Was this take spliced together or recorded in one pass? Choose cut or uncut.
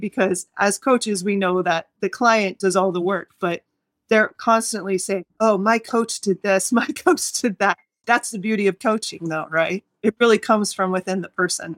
cut